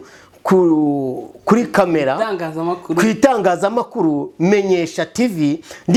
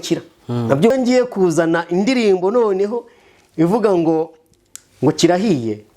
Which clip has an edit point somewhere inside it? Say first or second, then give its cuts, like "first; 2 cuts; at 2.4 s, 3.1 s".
second; 1 cut; at 0.9 s